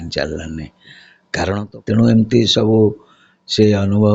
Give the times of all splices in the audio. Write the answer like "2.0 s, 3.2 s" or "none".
1.6 s